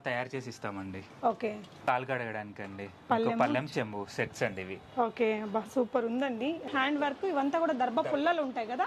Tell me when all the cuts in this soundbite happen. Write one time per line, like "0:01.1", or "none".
0:01.8
0:06.6

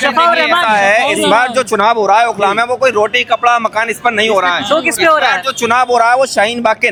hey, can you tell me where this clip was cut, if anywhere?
none

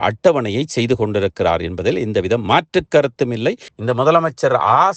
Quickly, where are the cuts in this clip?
0:03.7

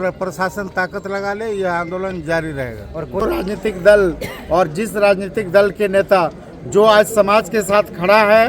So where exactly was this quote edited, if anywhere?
0:03.2

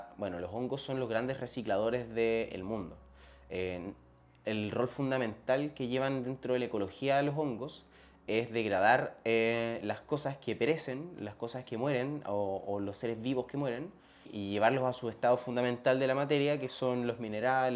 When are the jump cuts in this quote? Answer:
0:14.3

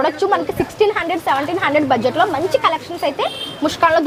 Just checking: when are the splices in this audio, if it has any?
none

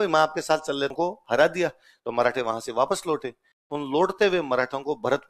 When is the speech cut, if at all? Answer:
0:00.9

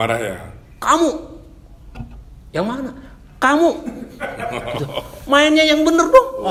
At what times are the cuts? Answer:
none

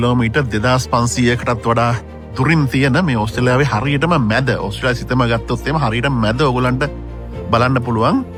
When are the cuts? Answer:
none

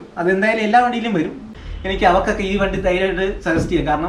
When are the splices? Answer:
0:01.5

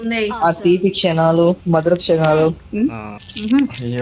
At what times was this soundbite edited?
none

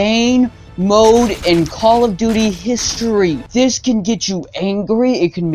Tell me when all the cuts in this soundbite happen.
0:03.4

